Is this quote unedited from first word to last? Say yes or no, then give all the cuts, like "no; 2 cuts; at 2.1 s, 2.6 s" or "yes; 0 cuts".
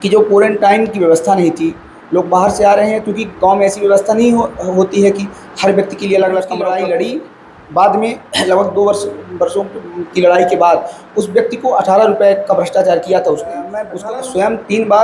no; 2 cuts; at 6.7 s, 13.9 s